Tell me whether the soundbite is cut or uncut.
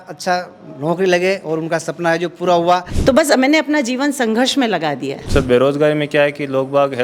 cut